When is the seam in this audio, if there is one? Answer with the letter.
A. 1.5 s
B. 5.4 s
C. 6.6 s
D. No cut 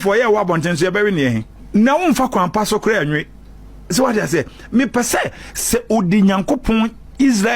A